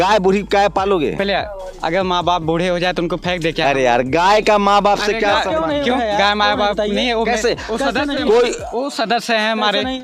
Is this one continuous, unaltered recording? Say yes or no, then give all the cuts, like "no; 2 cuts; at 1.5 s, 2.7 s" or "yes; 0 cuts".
yes; 0 cuts